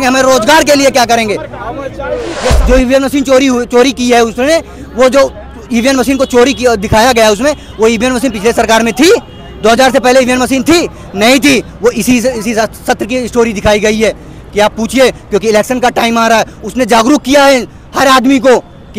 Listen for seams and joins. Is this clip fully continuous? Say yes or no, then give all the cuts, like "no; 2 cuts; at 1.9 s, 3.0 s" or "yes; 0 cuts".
no; 1 cut; at 2.5 s